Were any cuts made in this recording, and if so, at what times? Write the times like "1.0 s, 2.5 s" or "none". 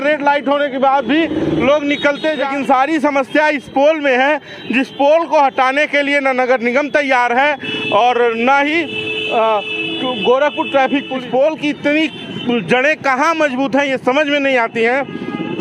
2.4 s, 11.1 s

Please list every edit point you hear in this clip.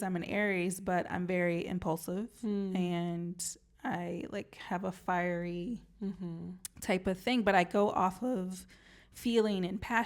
none

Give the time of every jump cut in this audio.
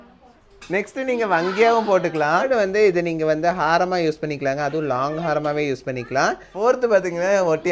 2.5 s, 6.5 s

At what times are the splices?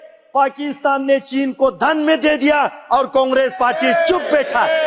none

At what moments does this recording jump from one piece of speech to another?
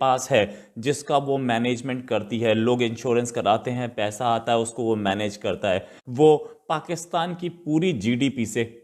6.0 s

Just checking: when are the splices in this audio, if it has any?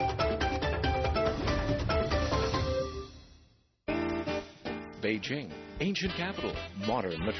4.6 s

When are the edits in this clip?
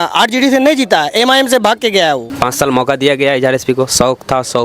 2.3 s

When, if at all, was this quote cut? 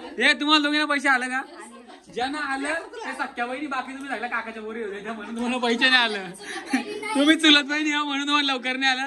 6.7 s

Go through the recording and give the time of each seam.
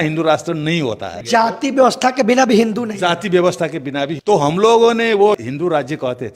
1.1 s, 4.2 s, 5.4 s

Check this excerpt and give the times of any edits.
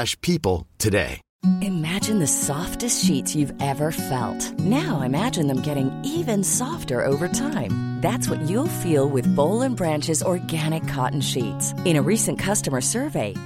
1.2 s

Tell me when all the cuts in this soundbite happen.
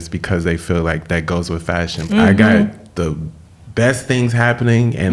2.0 s

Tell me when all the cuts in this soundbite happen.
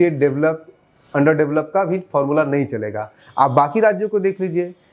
none

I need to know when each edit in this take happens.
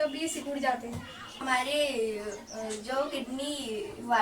1.4 s

